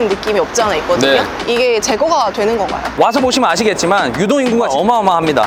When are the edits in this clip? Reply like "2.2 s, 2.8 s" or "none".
2.9 s